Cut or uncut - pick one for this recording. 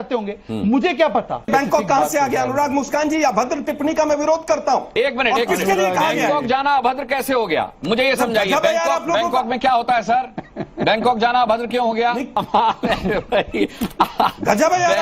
cut